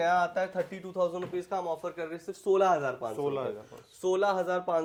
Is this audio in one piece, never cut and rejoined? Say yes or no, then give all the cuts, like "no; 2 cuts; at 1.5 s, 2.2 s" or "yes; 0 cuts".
yes; 0 cuts